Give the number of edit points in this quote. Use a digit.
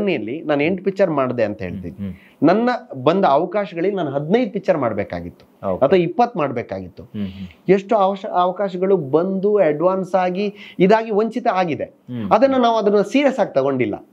0